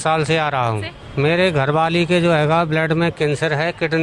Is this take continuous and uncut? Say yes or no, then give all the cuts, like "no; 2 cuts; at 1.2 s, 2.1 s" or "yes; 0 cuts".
no; 1 cut; at 1.0 s